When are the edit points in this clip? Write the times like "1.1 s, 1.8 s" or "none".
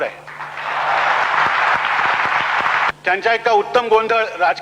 1.2 s, 2.9 s